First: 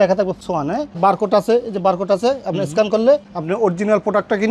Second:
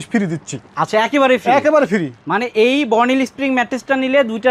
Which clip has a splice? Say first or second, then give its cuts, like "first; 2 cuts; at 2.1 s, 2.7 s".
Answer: first; 1 cut; at 1.0 s